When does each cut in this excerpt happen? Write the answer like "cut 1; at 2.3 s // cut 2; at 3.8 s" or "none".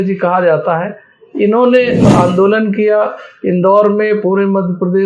cut 1; at 2.1 s